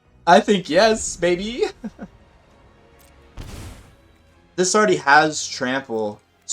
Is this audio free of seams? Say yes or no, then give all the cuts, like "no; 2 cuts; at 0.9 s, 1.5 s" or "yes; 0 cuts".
no; 1 cut; at 2.1 s